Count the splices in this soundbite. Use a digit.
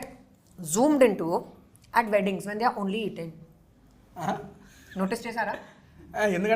0